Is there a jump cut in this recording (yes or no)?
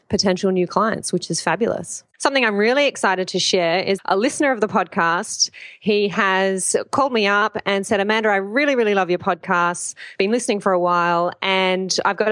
yes